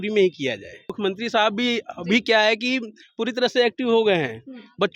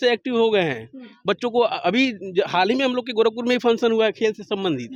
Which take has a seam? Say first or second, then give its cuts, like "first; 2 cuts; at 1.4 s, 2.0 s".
first; 1 cut; at 0.9 s